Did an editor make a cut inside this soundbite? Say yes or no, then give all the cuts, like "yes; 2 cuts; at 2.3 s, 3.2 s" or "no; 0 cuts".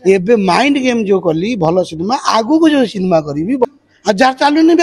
yes; 1 cut; at 3.6 s